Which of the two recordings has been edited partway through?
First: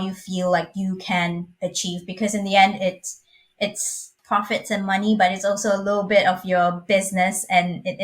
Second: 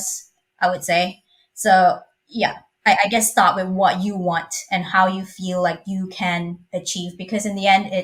first; 1 cut; at 4.2 s

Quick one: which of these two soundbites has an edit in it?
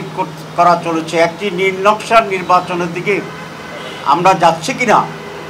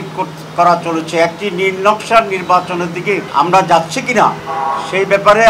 second; 2 cuts; at 3.3 s, 4.5 s

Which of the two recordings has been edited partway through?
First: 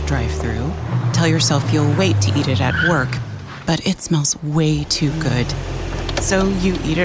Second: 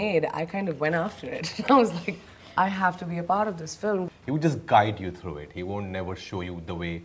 second; 1 cut; at 4.1 s

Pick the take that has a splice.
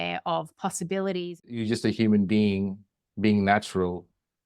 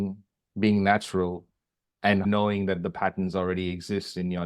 first; 1 cut; at 1.6 s

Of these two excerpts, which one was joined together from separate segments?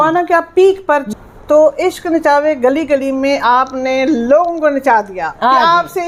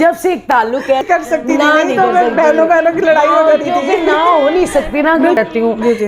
second; 2 cuts; at 1.0 s, 5.4 s

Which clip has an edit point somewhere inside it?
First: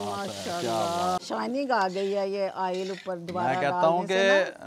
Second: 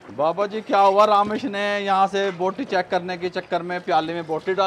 first; 1 cut; at 1.2 s

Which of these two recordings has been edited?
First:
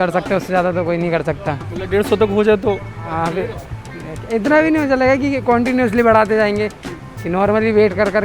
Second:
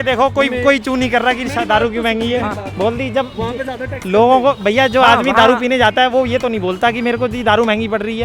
second; 1 cut; at 2.6 s

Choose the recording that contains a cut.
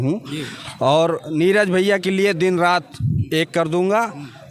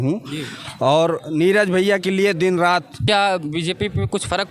second; 1 cut; at 3.0 s

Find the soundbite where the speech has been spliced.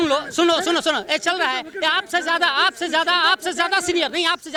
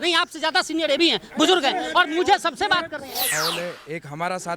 second; 1 cut; at 3.3 s

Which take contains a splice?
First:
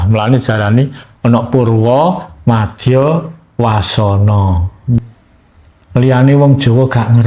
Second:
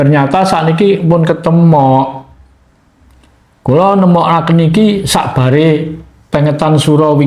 first; 1 cut; at 5.0 s

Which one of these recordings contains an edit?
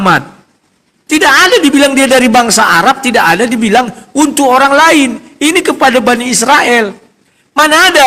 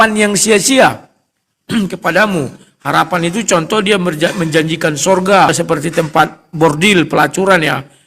second; 1 cut; at 5.5 s

